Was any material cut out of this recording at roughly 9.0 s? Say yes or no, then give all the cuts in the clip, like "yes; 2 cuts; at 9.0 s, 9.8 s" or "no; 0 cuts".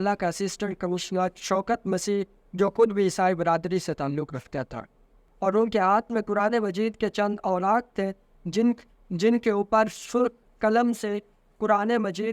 no; 1 cut; at 5.2 s